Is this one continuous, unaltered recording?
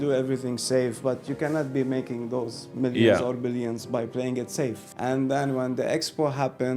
no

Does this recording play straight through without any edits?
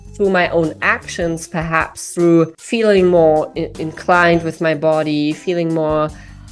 no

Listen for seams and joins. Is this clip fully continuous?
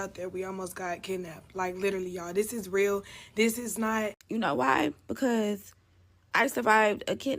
no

